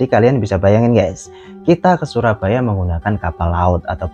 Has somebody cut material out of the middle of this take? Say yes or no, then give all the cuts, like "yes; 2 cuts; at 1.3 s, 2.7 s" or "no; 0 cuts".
no; 0 cuts